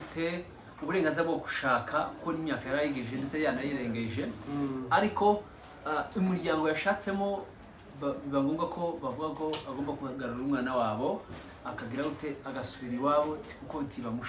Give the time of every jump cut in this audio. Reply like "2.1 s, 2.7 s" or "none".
none